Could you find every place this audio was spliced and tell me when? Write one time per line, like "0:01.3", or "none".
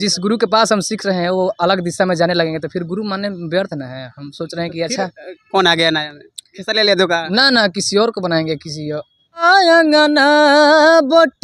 0:09.4